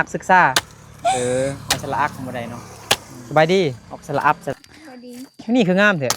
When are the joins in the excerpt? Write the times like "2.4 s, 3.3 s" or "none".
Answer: 3.1 s, 3.9 s, 4.5 s